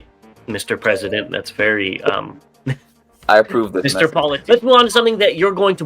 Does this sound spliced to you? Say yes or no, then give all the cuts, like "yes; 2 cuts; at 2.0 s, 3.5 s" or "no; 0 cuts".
yes; 1 cut; at 4.2 s